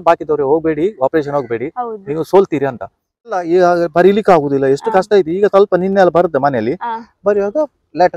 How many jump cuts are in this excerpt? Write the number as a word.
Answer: one